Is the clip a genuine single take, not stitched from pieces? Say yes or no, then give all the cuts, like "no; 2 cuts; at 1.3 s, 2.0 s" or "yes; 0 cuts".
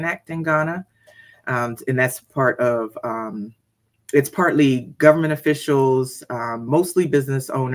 yes; 0 cuts